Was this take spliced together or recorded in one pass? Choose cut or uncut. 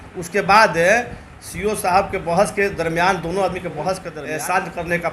cut